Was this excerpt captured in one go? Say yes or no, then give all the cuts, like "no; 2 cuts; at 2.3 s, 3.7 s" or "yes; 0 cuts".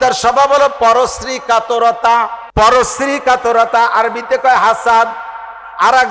no; 1 cut; at 2.4 s